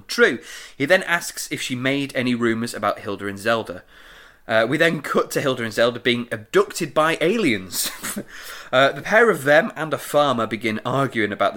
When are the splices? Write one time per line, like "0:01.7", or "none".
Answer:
none